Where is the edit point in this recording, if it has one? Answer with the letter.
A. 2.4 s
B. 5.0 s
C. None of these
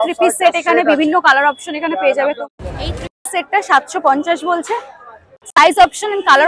A